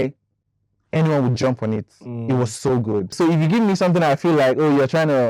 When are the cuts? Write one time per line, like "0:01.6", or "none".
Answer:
0:03.1